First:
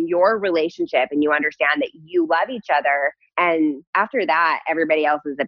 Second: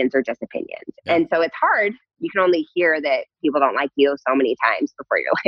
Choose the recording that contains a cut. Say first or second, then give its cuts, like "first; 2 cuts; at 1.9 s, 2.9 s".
first; 2 cuts; at 3.2 s, 3.8 s